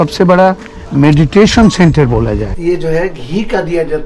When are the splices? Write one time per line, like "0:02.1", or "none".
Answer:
0:02.5